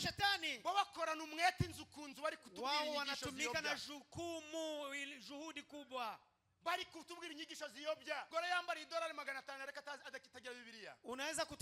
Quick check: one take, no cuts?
no; 1 cut; at 8.3 s

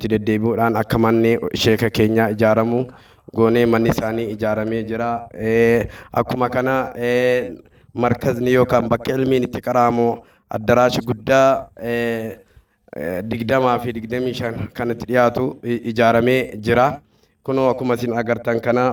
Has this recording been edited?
no; 0 cuts

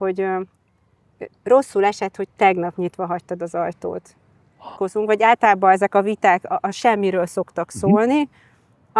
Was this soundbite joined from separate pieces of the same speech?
yes; 1 cut; at 4.8 s

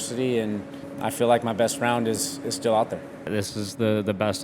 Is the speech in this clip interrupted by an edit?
yes; 2 cuts; at 0.9 s, 3.3 s

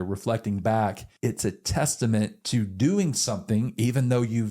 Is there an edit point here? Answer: yes; 1 cut; at 1.1 s

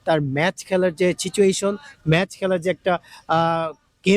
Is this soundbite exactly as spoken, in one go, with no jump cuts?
yes; 0 cuts

